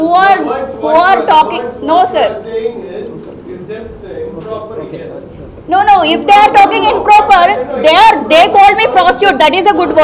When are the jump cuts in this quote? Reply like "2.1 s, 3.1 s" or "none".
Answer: none